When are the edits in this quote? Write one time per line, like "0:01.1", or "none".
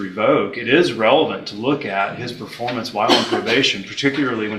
none